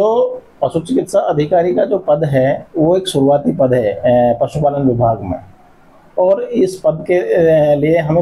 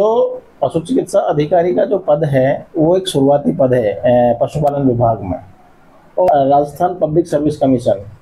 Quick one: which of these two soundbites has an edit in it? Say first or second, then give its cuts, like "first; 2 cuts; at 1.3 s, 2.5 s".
second; 1 cut; at 6.3 s